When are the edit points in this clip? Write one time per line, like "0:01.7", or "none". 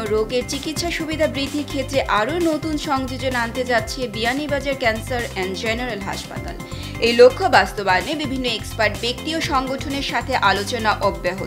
none